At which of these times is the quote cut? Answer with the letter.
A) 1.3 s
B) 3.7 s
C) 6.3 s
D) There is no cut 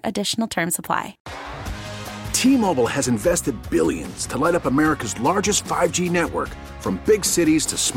A